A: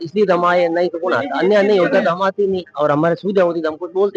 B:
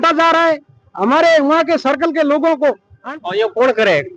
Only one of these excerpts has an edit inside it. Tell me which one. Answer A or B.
B